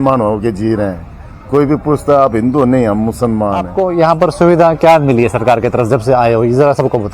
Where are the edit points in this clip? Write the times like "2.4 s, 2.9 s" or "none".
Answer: 3.7 s